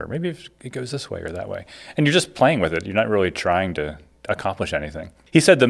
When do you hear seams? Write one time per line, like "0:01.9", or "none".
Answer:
none